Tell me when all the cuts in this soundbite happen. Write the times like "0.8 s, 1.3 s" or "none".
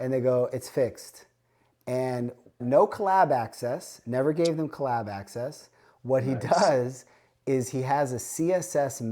2.6 s